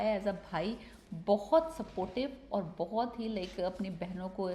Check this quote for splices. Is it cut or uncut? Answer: uncut